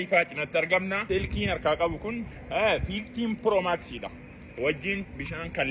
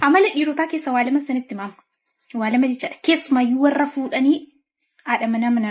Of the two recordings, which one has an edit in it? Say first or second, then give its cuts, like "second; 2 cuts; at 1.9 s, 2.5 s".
first; 1 cut; at 1.0 s